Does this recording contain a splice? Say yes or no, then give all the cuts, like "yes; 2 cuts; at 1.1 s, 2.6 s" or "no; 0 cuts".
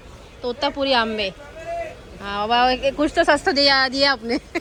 no; 0 cuts